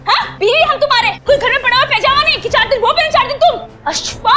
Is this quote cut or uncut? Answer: cut